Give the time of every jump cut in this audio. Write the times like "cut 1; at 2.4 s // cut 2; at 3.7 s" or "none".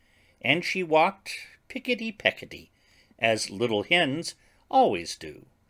cut 1; at 2.3 s